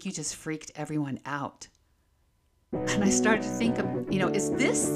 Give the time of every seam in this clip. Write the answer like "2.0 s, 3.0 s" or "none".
none